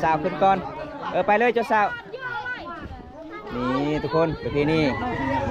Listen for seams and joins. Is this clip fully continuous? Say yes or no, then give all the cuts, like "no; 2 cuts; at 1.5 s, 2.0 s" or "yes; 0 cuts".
yes; 0 cuts